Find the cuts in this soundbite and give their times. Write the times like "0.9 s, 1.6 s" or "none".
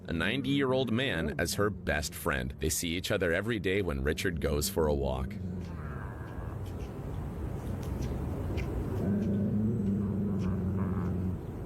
none